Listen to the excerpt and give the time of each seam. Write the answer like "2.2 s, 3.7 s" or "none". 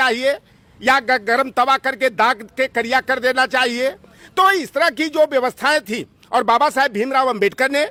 none

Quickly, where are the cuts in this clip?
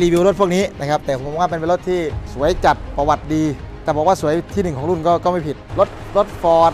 2.2 s, 3.7 s, 5.6 s

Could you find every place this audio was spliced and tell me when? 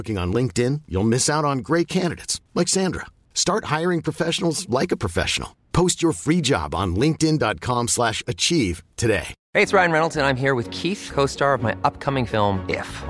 9.4 s

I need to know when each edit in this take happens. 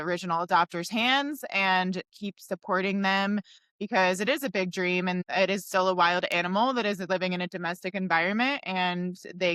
5.2 s

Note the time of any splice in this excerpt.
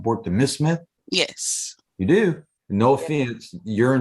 1.0 s, 2.5 s

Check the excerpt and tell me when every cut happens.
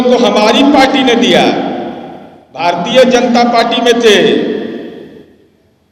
none

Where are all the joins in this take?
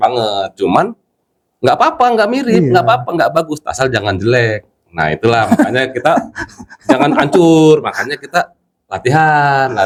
none

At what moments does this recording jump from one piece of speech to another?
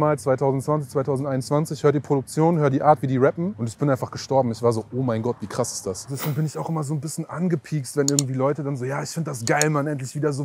3.6 s, 6.2 s

